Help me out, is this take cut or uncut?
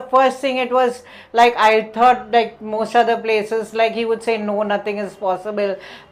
uncut